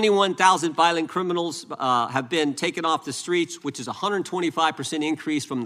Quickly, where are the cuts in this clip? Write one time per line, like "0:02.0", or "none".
none